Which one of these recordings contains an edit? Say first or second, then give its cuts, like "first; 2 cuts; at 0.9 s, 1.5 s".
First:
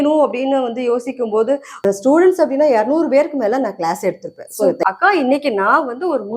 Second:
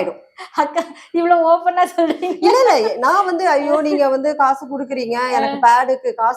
first; 2 cuts; at 1.8 s, 4.8 s